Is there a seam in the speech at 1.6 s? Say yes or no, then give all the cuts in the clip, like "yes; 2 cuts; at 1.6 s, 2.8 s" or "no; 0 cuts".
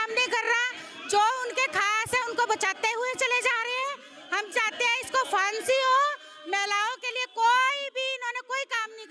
no; 0 cuts